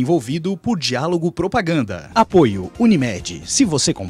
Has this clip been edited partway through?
yes; 1 cut; at 2.3 s

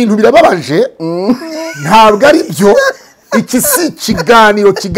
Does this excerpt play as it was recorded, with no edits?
yes; 0 cuts

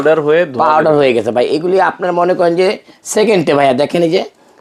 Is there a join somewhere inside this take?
no; 0 cuts

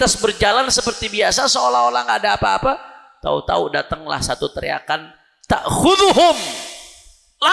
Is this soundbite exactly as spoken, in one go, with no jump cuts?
yes; 0 cuts

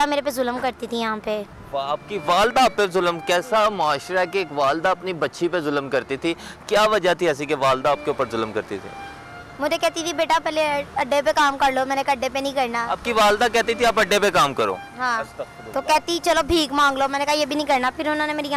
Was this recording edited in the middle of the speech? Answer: no; 0 cuts

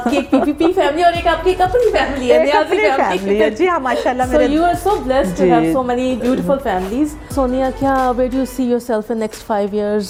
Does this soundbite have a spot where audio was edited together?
no; 0 cuts

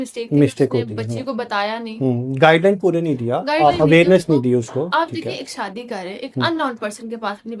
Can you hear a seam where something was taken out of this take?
no; 0 cuts

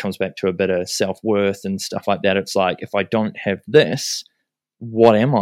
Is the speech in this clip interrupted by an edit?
no; 0 cuts

